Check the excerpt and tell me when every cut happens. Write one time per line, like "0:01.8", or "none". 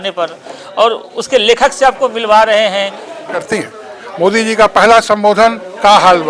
0:03.4